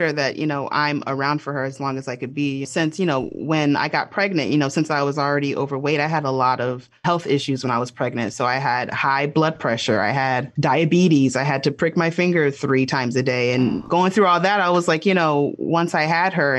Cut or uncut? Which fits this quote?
uncut